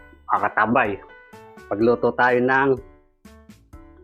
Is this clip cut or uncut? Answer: cut